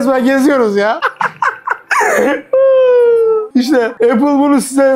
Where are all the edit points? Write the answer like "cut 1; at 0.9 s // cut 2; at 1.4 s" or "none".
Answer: cut 1; at 1.0 s // cut 2; at 3.6 s